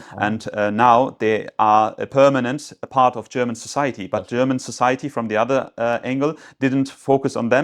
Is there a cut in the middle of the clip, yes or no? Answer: no